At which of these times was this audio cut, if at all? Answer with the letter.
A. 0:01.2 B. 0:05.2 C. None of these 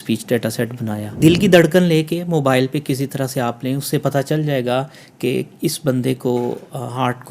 A